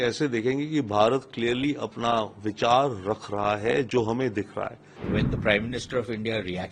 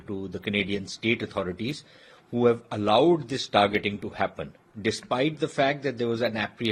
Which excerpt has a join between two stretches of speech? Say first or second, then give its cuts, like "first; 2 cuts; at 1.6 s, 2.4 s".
first; 1 cut; at 5.1 s